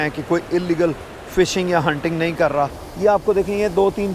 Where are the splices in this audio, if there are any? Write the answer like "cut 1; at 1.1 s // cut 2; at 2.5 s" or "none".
cut 1; at 2.8 s